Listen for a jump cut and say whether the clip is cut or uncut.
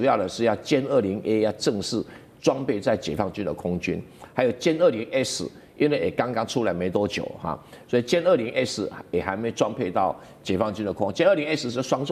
uncut